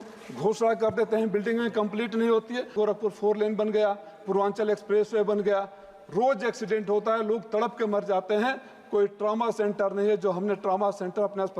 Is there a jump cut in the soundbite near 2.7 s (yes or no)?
yes